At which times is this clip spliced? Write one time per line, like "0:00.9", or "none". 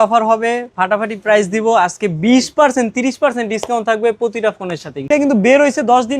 0:05.1